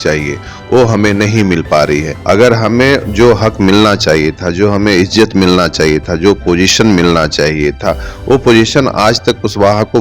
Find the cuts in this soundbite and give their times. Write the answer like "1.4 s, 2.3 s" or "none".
2.1 s